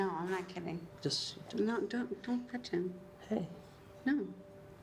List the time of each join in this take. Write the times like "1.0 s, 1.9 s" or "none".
none